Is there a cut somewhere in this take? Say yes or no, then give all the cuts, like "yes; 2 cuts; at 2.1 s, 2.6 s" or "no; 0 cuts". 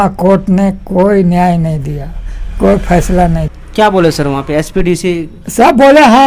yes; 1 cut; at 3.6 s